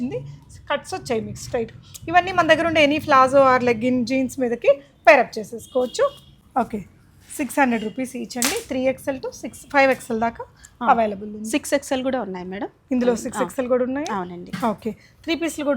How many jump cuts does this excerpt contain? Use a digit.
0